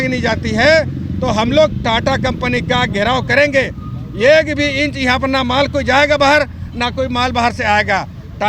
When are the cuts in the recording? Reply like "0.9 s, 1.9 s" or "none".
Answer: none